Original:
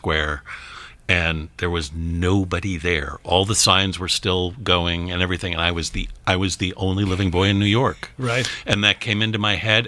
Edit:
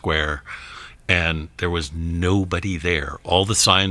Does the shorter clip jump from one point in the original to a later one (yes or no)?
no